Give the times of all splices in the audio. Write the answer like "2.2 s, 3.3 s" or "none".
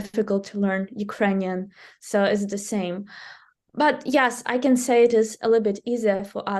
none